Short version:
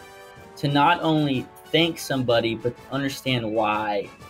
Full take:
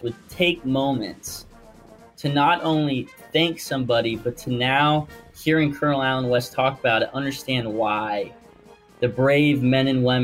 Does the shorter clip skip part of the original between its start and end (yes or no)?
yes